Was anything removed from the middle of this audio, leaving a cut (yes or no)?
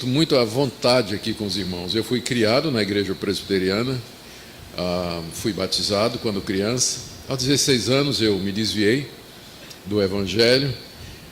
yes